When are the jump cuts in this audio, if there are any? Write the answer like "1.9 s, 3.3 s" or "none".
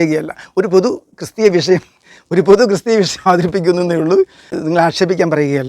4.6 s